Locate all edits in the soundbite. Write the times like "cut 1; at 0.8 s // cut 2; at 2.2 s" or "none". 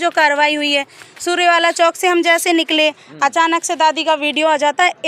none